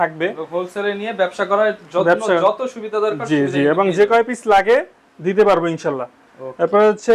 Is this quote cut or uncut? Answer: uncut